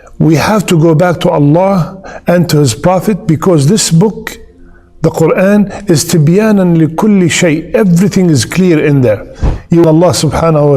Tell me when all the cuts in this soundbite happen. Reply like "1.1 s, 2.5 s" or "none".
9.8 s